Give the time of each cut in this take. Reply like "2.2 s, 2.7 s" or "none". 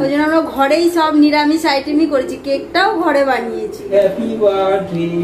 3.9 s

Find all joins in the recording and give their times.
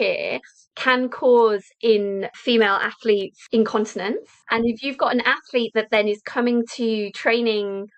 2.3 s, 3.4 s, 4.3 s

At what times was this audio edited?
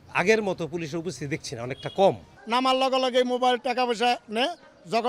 2.3 s

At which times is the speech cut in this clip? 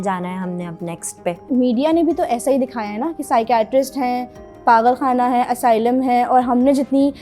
1.4 s

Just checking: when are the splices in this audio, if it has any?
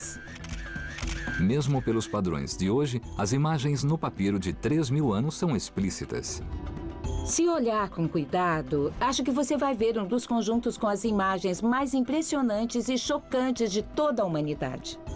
none

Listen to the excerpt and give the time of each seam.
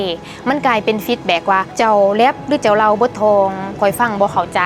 1.7 s, 3.7 s

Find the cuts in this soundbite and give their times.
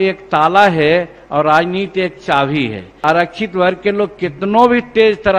2.9 s

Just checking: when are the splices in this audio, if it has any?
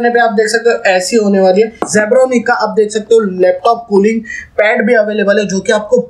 1.9 s

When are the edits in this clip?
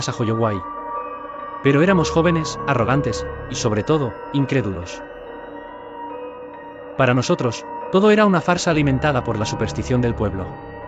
4.8 s, 6.5 s

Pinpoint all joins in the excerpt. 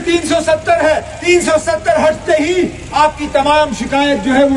1.2 s, 2.8 s

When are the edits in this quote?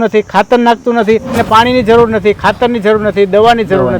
1.4 s

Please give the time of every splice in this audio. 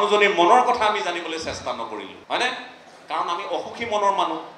2.1 s

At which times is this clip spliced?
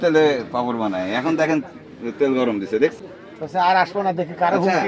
3.0 s

